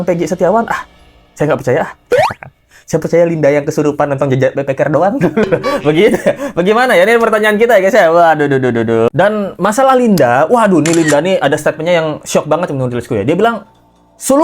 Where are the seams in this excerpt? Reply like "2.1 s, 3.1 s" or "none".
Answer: none